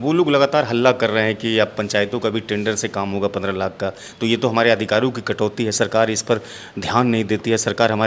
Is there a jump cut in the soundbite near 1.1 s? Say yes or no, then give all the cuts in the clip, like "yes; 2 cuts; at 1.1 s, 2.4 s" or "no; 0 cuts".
no; 0 cuts